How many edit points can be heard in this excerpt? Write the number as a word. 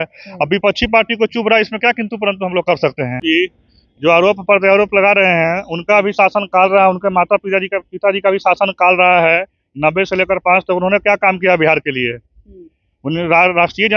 one